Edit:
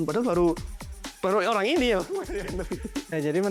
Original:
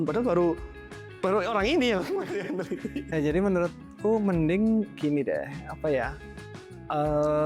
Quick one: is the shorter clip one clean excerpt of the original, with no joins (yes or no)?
yes